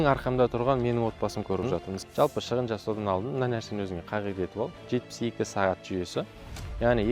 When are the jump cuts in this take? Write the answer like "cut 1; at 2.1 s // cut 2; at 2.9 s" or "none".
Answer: cut 1; at 1.8 s